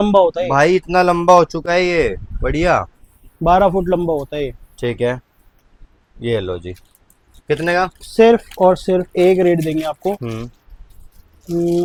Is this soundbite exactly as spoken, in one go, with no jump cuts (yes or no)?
yes